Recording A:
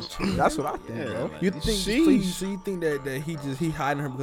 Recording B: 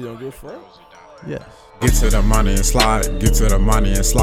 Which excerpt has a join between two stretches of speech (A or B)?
B